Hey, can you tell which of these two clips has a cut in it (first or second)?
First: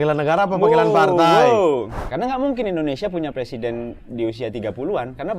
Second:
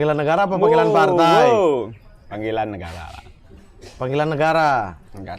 first